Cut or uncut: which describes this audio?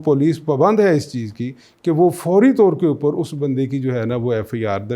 uncut